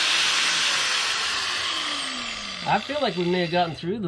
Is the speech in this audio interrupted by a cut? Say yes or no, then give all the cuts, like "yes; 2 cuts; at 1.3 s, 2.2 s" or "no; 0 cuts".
no; 0 cuts